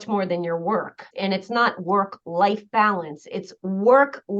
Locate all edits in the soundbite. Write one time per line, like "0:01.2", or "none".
0:01.0